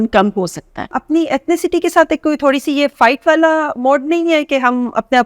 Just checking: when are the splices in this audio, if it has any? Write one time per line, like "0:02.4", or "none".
0:01.0